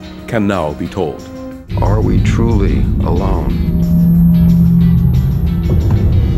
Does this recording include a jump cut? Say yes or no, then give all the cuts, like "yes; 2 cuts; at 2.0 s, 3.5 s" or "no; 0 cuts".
yes; 1 cut; at 1.5 s